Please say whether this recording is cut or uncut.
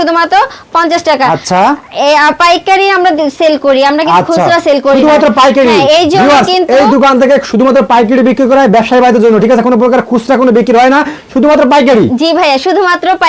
uncut